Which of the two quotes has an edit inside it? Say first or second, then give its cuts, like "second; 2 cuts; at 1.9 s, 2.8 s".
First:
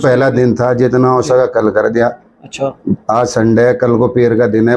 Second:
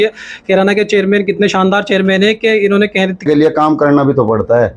second; 1 cut; at 3.2 s